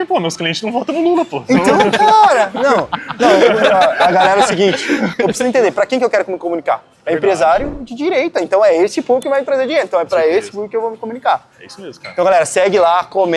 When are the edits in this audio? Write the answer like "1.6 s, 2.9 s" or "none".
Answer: none

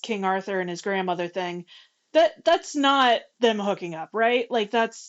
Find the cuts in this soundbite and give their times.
3.3 s

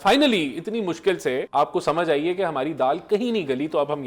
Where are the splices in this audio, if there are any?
1.5 s

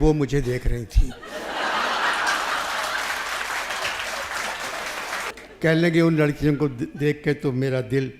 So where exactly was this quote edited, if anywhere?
5.3 s

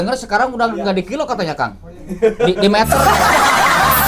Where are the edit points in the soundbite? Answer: none

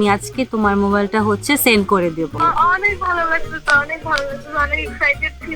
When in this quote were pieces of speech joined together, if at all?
2.3 s

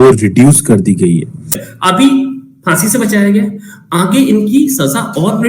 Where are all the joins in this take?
1.7 s

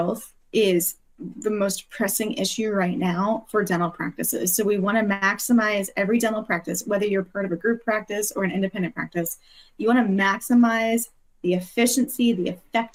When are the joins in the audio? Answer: none

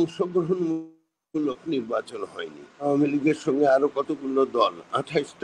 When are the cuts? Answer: 2.8 s

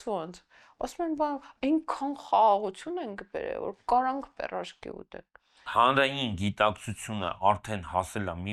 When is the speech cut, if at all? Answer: 5.7 s

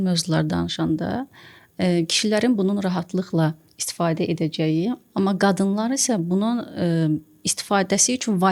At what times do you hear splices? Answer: none

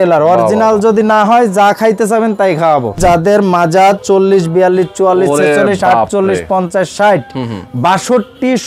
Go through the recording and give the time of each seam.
3.0 s

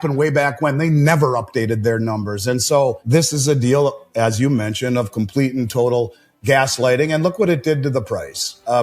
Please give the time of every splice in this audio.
3.0 s

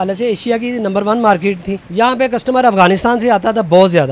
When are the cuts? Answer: 1.8 s

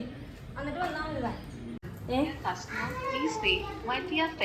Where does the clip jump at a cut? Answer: 1.8 s

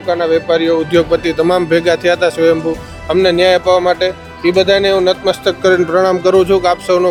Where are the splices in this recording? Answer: none

